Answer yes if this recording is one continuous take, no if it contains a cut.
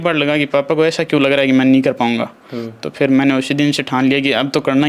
yes